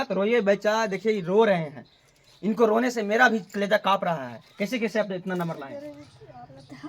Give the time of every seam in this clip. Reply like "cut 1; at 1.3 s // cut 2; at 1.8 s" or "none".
cut 1; at 5.8 s

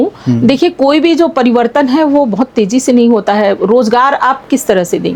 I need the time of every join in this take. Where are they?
none

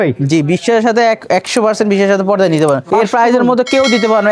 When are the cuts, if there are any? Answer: cut 1; at 2.8 s

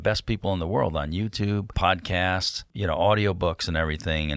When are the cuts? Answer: cut 1; at 1.7 s // cut 2; at 2.6 s

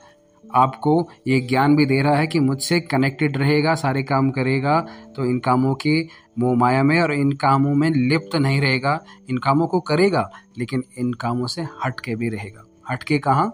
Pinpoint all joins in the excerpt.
none

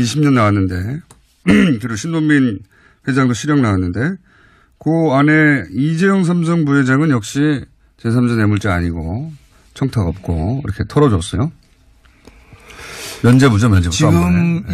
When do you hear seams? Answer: none

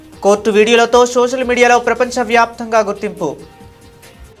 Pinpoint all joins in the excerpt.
none

